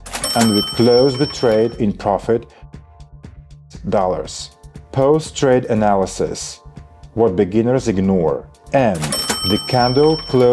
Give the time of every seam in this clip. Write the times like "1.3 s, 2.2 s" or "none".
4.8 s, 8.5 s